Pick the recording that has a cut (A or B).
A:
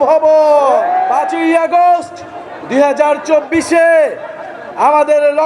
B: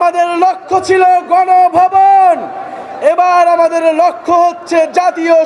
A